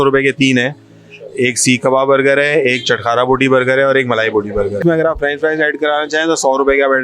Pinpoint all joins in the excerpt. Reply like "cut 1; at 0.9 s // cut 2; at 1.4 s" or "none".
cut 1; at 4.8 s

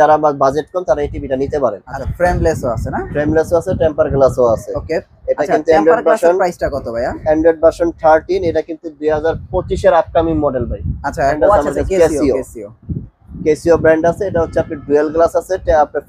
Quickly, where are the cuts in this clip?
cut 1; at 1.9 s // cut 2; at 11.4 s

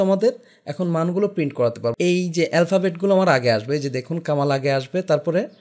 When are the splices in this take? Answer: cut 1; at 1.9 s

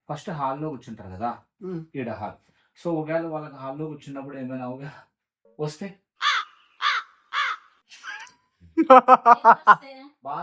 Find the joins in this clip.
none

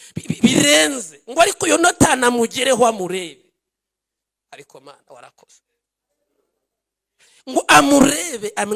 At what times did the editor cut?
none

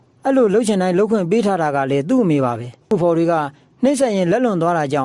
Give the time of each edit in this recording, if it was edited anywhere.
cut 1; at 2.9 s

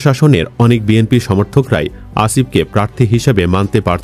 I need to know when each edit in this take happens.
none

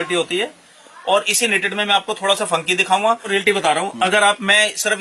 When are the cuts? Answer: cut 1; at 3.3 s

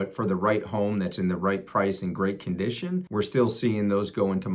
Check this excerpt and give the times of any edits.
none

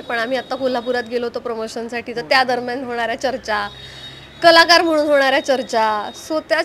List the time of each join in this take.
none

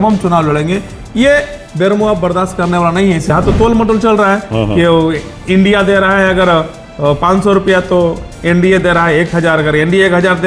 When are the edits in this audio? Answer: cut 1; at 3.3 s

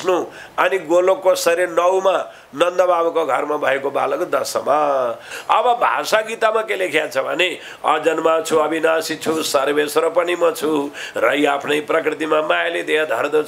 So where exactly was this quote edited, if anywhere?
cut 1; at 5.3 s

